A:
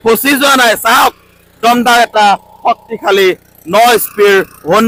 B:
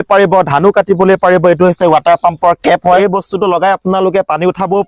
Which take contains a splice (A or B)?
B